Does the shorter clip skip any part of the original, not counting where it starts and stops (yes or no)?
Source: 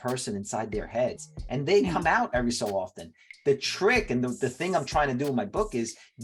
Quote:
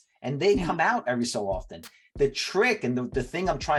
no